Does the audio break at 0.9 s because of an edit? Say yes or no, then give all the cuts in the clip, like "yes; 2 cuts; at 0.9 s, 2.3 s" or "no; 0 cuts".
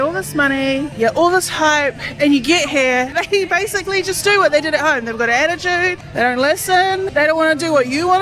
yes; 4 cuts; at 0.9 s, 3.1 s, 6.0 s, 7.1 s